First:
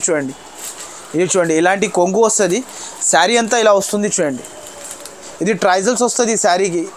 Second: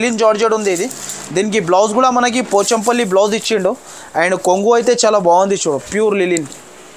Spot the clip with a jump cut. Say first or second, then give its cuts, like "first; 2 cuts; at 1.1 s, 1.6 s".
first; 1 cut; at 5.2 s